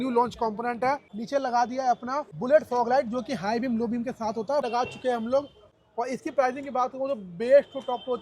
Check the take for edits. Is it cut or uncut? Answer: cut